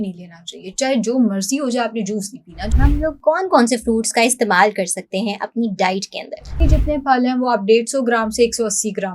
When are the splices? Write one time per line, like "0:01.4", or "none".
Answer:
0:02.7
0:06.6